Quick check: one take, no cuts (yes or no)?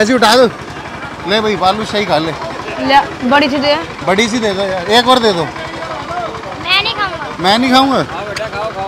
yes